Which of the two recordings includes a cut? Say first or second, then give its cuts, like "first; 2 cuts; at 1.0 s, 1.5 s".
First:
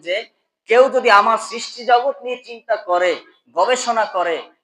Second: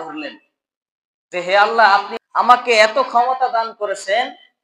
second; 1 cut; at 2.1 s